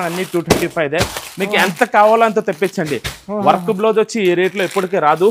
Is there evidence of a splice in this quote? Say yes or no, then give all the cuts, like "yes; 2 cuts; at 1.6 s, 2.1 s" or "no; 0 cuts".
no; 0 cuts